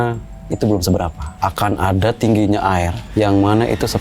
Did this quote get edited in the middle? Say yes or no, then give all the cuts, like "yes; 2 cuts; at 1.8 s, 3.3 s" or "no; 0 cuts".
yes; 2 cuts; at 1.2 s, 3.0 s